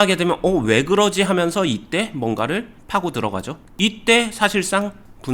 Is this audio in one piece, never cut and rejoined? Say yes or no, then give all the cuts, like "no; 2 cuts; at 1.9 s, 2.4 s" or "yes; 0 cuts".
yes; 0 cuts